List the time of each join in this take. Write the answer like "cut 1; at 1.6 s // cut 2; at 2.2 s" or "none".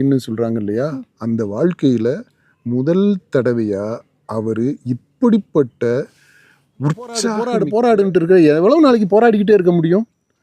cut 1; at 7.4 s

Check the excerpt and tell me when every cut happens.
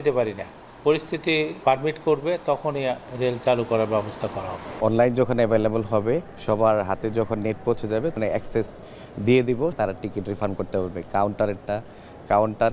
cut 1; at 3.1 s // cut 2; at 4.8 s // cut 3; at 6.3 s // cut 4; at 8.2 s // cut 5; at 9.8 s

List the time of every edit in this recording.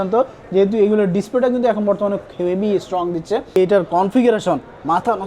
cut 1; at 3.6 s

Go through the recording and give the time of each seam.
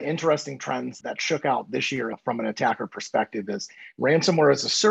cut 1; at 1.0 s

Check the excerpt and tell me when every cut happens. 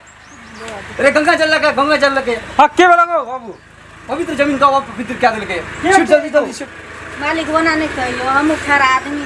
none

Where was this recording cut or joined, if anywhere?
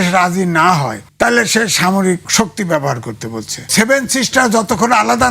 cut 1; at 1.0 s // cut 2; at 2.3 s // cut 3; at 3.7 s

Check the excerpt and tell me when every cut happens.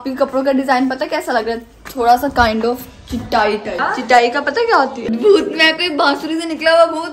cut 1; at 3.8 s // cut 2; at 5.1 s

